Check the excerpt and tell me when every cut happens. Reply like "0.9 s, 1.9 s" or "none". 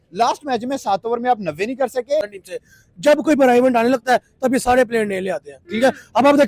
2.4 s

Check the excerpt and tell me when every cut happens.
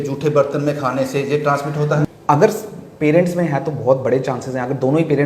2.0 s

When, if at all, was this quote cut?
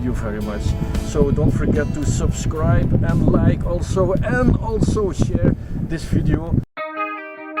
6.7 s

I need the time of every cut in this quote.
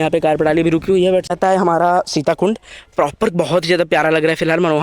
1.3 s

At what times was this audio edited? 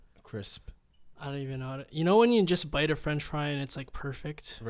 none

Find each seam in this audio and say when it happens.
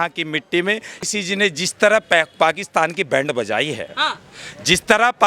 1.0 s

